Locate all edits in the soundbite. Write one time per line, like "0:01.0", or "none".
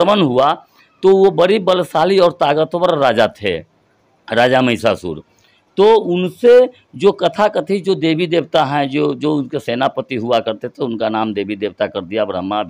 none